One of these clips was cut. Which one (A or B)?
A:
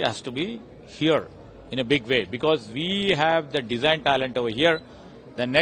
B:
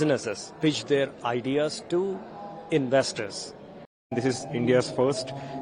B